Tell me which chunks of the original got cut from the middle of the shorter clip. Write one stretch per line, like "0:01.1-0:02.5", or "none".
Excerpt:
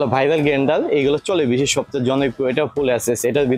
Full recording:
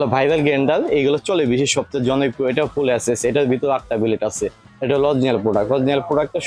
none